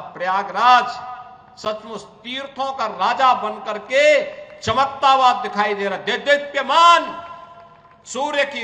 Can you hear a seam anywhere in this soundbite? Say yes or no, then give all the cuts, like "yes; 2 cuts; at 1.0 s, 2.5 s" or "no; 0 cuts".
no; 0 cuts